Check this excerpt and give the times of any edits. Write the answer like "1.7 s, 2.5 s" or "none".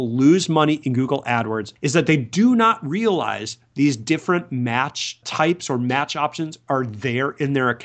1.7 s, 5.2 s